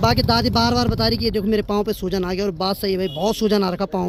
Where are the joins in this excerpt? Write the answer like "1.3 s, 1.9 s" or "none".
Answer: none